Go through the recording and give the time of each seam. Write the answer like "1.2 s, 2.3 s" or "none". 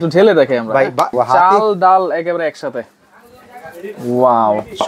1.1 s